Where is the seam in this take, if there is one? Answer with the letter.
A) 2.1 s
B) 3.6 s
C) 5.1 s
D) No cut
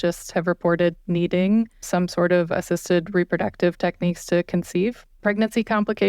C